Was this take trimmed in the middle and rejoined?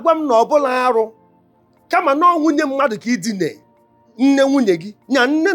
yes; 1 cut; at 3.7 s

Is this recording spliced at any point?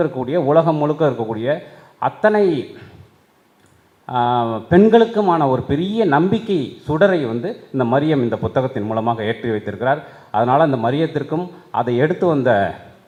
no; 0 cuts

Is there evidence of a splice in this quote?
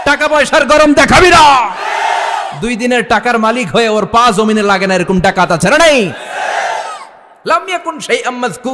no; 0 cuts

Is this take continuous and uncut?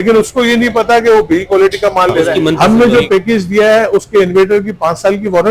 no; 1 cut; at 2.3 s

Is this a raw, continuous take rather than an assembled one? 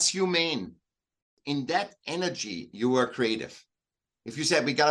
no; 1 cut; at 1.3 s

